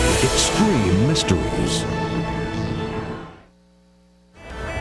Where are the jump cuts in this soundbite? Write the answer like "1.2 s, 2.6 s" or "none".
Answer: 1.9 s

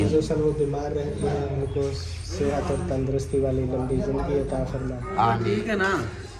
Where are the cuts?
5.4 s

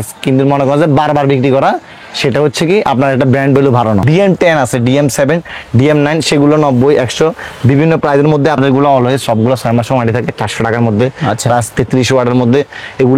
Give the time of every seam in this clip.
4.0 s, 8.6 s

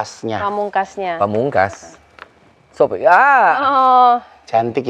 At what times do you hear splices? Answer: none

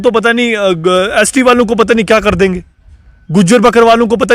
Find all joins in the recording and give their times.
none

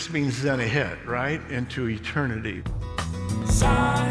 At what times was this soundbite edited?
2.6 s

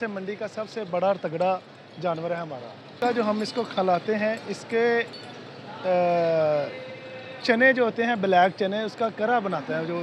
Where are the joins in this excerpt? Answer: 2.9 s

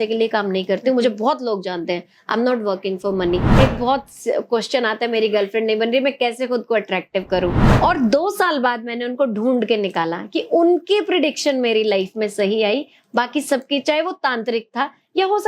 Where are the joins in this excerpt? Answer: 3.5 s, 7.6 s

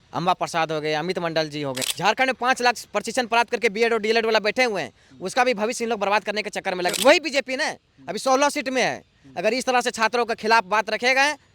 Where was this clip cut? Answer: 1.9 s, 7.0 s

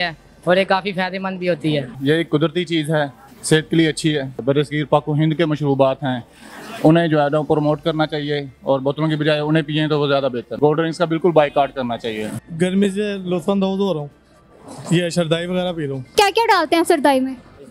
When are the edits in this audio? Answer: 1.9 s, 4.4 s, 10.5 s, 12.4 s, 16.1 s

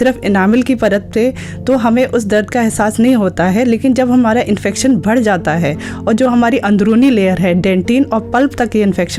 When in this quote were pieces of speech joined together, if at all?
none

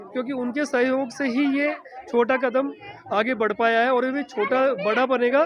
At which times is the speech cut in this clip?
none

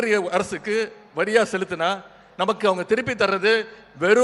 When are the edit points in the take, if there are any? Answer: none

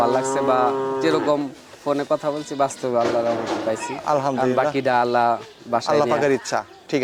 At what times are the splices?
none

